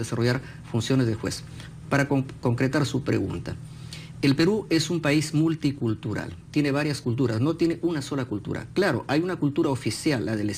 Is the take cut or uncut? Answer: cut